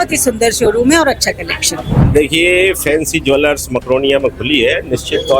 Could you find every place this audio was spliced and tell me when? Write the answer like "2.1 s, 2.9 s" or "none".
1.9 s